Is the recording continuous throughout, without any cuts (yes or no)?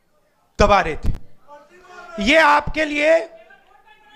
yes